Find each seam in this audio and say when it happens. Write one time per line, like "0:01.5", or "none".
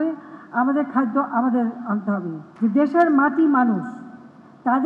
0:02.4